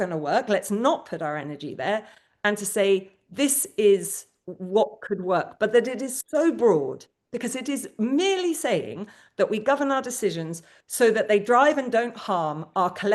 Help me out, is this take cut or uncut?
uncut